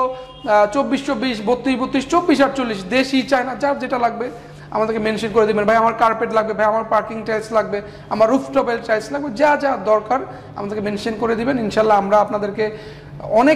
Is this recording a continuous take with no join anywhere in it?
yes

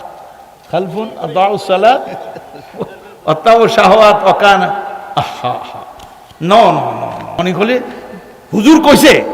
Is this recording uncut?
no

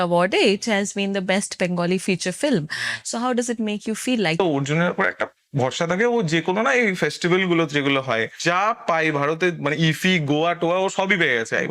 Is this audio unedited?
no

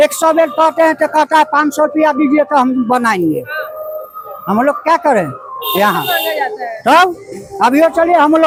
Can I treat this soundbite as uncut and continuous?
yes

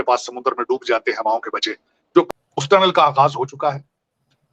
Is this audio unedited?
no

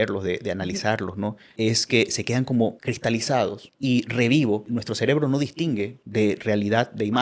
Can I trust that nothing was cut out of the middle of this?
no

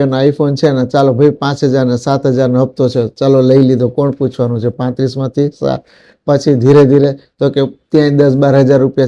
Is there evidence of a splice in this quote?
no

